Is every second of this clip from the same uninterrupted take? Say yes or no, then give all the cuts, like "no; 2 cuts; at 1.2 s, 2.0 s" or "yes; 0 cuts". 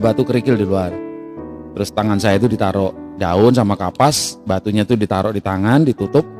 no; 1 cut; at 4.3 s